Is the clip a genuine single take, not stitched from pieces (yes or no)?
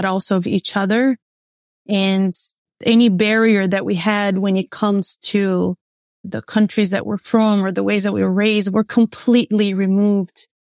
no